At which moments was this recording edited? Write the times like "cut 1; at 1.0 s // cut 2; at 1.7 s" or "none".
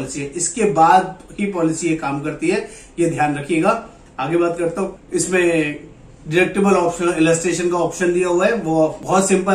none